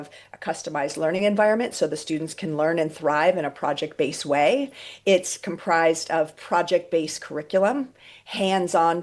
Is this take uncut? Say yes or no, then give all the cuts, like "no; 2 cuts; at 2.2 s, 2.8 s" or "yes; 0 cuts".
yes; 0 cuts